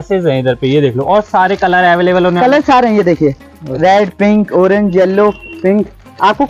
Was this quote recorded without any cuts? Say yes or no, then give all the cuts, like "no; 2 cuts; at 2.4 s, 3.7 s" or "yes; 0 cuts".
yes; 0 cuts